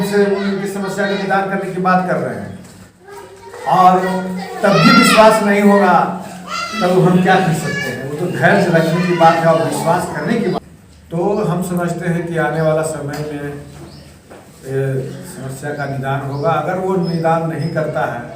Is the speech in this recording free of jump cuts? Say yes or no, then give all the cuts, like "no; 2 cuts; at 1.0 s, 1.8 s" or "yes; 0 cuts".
no; 1 cut; at 10.6 s